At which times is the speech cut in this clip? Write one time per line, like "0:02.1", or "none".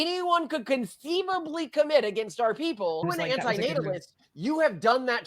0:03.0